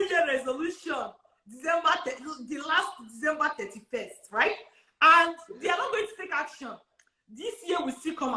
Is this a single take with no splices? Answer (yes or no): yes